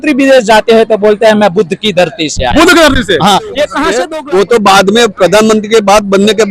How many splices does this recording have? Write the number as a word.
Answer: one